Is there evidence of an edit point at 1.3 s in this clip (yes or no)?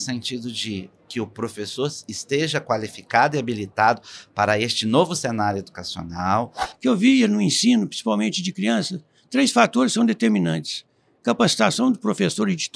no